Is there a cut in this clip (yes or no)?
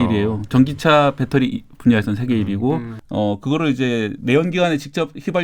yes